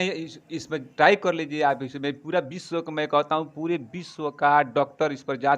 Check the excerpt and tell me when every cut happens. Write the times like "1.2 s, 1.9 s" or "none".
none